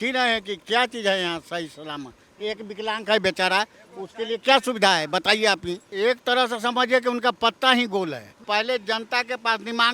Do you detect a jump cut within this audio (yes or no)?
yes